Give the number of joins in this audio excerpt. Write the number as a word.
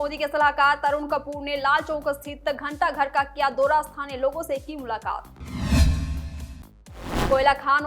zero